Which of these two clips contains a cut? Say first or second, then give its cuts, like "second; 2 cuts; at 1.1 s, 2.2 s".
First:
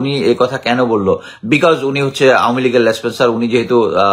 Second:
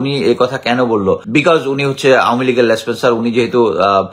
second; 1 cut; at 1.2 s